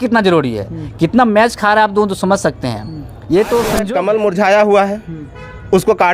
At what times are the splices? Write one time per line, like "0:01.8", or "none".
0:03.9